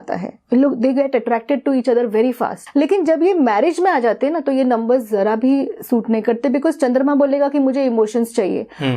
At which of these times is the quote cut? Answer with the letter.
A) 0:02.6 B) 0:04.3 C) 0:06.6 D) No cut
A